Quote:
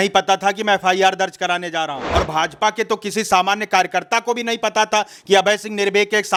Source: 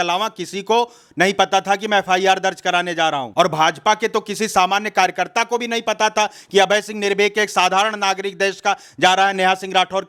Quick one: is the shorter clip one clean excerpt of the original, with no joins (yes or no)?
yes